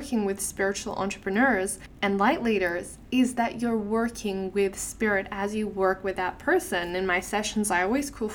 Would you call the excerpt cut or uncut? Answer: cut